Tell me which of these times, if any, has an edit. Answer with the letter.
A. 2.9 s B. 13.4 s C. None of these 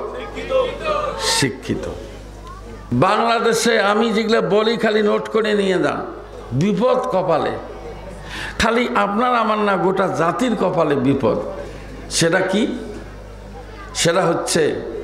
A